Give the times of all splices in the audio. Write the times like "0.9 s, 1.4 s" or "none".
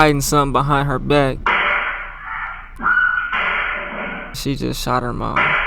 1.3 s, 2.6 s, 4.4 s

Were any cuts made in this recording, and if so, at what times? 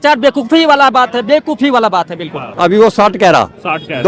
2.4 s

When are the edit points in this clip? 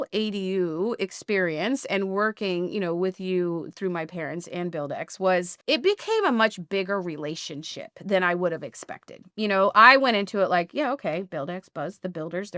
5.5 s

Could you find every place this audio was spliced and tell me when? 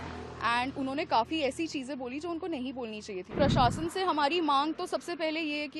3.3 s

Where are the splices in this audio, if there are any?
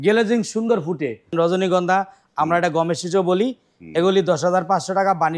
1.3 s

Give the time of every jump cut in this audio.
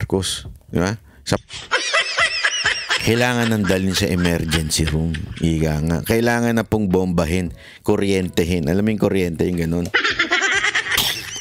1.4 s

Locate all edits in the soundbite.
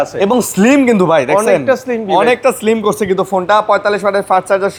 none

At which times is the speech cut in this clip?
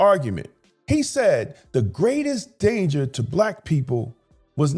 none

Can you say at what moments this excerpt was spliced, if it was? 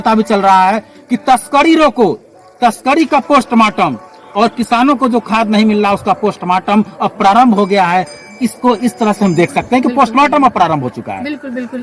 none

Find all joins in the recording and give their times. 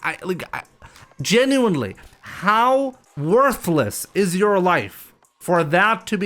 3.1 s

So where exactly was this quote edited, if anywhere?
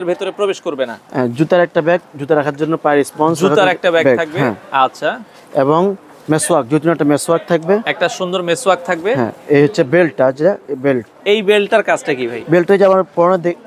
none

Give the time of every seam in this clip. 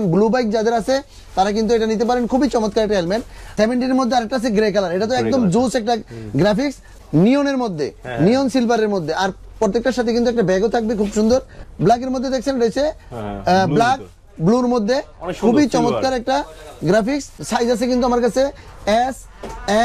3.5 s, 6.9 s, 11.6 s, 17.4 s

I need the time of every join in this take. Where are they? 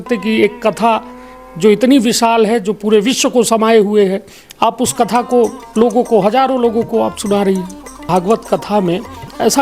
8.0 s

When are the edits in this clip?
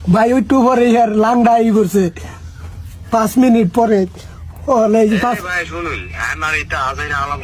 none

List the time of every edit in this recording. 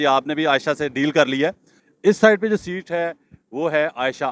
1.8 s

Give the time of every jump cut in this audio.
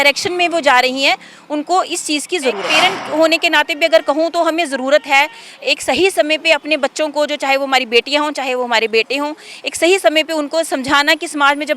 2.7 s

